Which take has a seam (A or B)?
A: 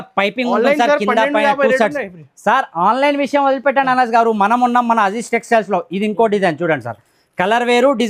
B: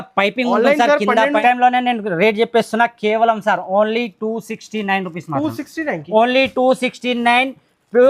B